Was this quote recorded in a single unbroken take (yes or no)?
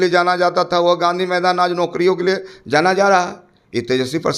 yes